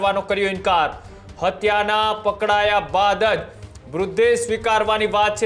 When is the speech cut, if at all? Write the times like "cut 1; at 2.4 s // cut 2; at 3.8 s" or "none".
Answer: none

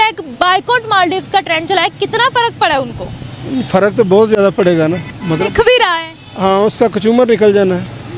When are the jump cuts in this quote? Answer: none

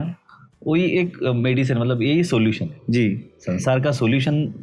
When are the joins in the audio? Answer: none

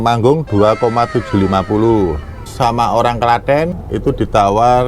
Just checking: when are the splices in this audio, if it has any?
cut 1; at 2.5 s // cut 2; at 3.8 s

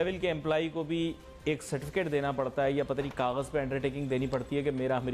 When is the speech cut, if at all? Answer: none

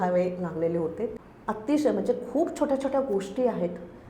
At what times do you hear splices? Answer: cut 1; at 1.2 s

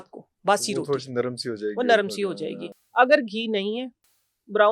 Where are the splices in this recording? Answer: none

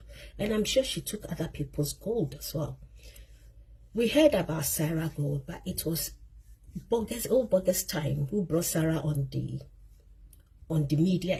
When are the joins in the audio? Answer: none

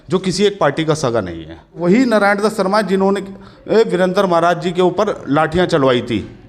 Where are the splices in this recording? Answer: cut 1; at 1.8 s

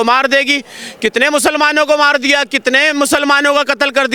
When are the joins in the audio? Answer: none

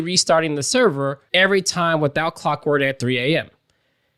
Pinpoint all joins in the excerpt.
cut 1; at 1.2 s

